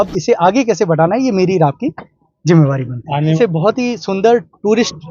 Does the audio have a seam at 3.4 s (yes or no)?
yes